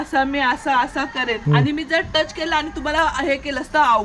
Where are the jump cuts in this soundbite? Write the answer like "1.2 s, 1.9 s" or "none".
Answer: 1.4 s